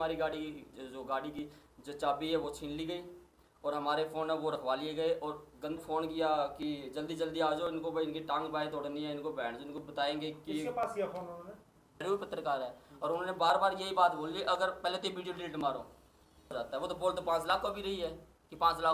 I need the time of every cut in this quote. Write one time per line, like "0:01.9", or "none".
0:05.8
0:12.0
0:16.5